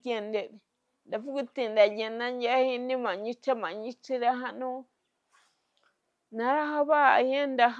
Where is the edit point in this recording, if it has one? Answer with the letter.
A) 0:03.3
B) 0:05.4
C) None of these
C